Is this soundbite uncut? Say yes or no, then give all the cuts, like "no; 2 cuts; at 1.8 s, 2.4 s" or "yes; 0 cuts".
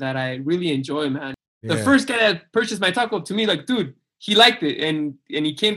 no; 1 cut; at 1.3 s